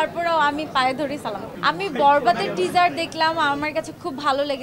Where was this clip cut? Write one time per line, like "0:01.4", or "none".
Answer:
0:01.5